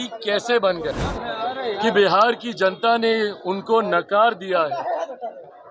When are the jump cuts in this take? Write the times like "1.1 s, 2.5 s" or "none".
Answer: 1.0 s